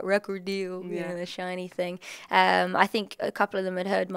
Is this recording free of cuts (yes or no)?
yes